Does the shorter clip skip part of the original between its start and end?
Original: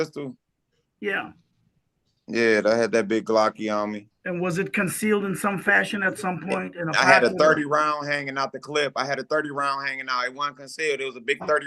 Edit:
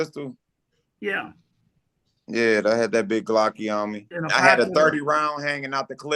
yes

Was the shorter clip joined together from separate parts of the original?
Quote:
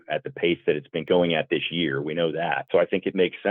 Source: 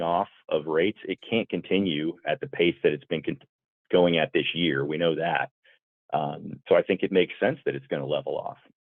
yes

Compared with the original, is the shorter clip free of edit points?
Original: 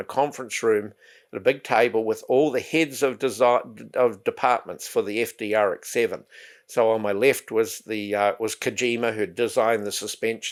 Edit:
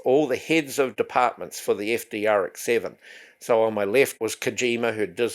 no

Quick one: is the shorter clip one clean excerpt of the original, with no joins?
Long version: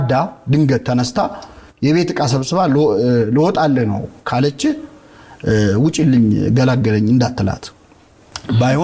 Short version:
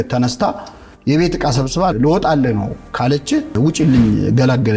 no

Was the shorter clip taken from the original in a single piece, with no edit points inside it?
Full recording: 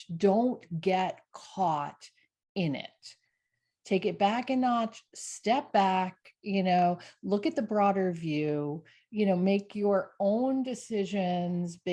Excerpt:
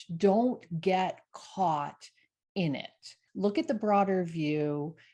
no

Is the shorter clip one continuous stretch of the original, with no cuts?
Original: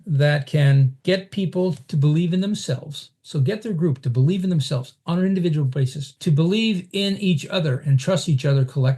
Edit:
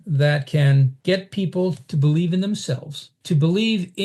no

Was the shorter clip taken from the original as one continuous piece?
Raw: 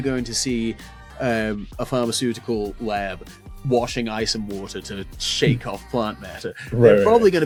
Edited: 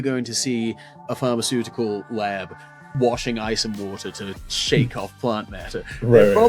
no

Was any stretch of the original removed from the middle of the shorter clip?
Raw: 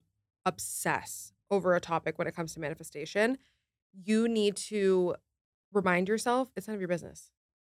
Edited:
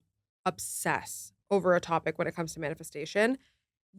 no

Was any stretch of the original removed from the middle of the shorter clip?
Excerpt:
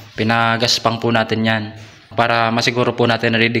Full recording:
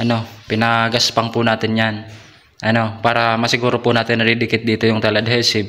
yes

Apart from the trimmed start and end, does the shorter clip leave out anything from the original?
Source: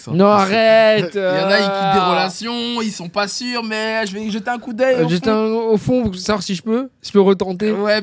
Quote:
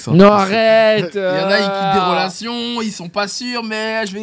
no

